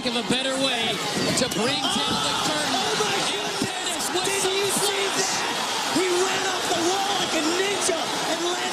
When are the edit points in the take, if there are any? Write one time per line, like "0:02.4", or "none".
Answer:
0:00.9